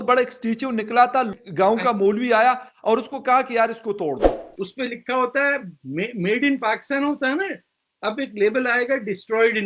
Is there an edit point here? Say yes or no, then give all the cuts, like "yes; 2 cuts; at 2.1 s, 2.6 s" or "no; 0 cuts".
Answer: yes; 2 cuts; at 1.3 s, 4.5 s